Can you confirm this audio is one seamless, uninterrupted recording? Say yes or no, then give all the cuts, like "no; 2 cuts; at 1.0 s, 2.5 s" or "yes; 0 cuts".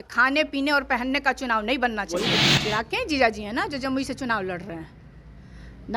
no; 1 cut; at 2.4 s